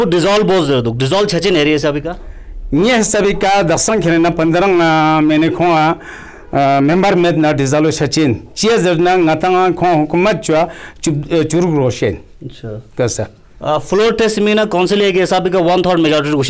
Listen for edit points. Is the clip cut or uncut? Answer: uncut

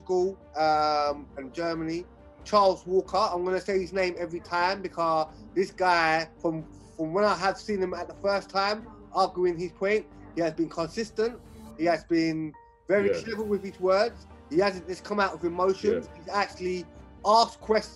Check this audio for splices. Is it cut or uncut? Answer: cut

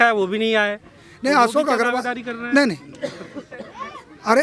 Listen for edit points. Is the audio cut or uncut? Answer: uncut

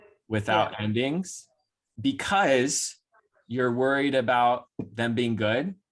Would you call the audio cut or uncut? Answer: uncut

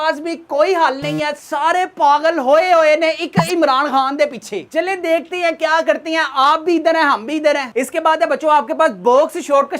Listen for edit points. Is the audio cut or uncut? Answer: uncut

